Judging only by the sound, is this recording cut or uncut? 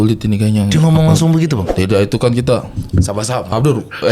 cut